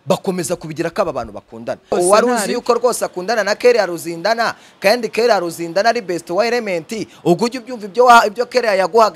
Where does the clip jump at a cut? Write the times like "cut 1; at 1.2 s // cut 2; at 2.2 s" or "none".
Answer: cut 1; at 1.9 s